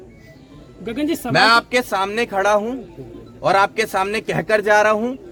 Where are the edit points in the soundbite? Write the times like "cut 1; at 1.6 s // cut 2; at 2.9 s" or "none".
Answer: none